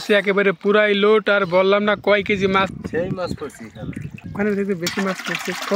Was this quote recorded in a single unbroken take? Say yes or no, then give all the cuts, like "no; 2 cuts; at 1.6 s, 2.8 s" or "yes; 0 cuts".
no; 2 cuts; at 2.7 s, 4.3 s